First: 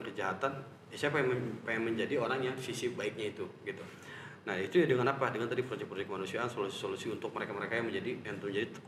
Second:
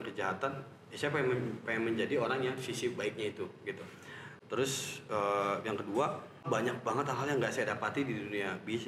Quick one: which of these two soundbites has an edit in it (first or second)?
second